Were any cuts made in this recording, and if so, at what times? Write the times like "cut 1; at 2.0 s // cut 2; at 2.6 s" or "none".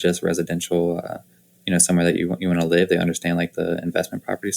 none